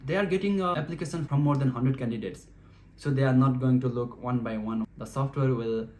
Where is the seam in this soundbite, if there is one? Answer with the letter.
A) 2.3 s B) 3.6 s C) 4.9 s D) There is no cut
C